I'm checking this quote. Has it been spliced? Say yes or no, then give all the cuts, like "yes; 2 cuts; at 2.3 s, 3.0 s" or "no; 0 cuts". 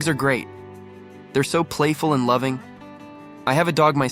no; 0 cuts